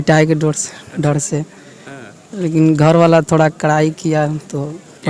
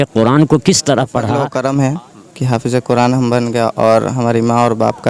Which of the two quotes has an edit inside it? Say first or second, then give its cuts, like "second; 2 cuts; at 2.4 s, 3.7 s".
second; 1 cut; at 1.4 s